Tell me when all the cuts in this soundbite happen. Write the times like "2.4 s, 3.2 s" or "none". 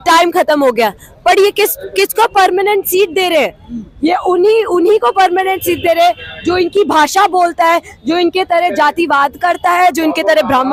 none